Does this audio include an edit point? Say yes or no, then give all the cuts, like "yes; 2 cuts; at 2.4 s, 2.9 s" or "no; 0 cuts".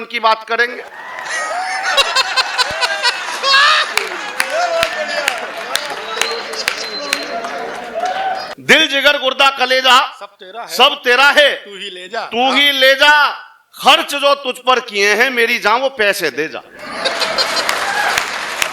yes; 1 cut; at 8.5 s